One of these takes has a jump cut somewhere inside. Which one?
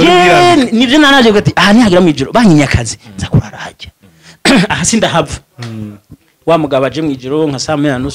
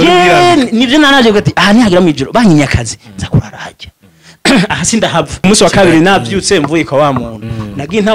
second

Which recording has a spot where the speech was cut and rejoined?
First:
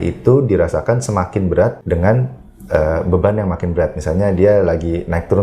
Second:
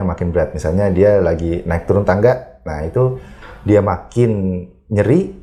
first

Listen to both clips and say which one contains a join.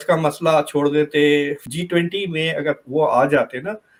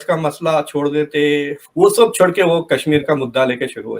second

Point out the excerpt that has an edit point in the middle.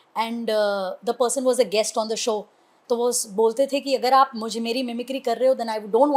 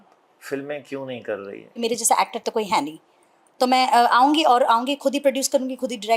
second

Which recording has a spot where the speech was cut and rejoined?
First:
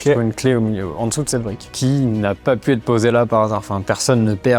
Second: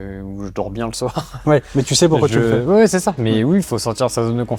first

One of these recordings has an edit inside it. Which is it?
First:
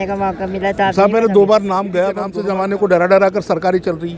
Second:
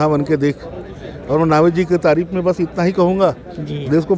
first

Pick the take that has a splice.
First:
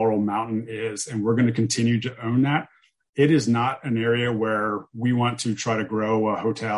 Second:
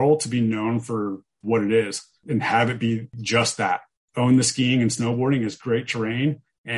second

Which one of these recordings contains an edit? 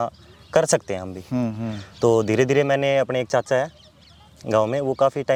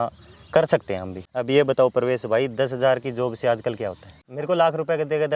second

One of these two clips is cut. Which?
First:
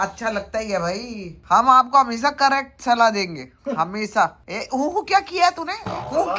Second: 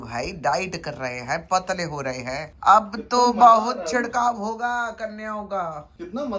second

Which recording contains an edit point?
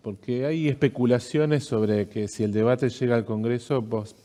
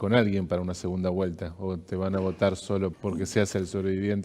second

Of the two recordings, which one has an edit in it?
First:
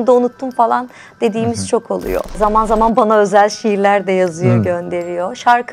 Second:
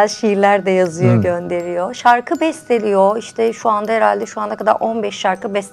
first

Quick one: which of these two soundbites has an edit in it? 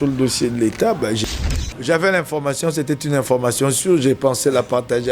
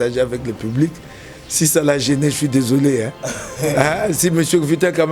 first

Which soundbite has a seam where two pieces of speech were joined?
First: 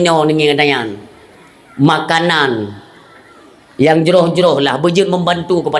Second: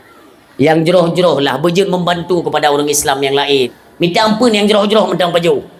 second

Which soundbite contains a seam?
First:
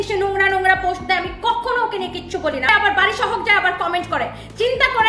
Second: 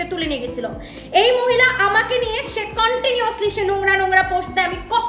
first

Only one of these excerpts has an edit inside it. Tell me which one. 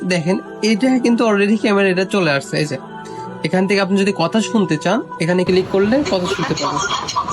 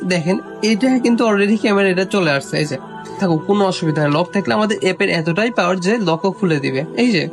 second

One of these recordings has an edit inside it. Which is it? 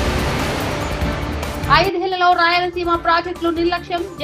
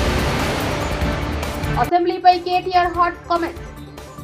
second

